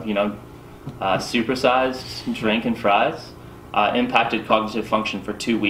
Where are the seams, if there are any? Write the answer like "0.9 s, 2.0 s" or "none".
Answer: none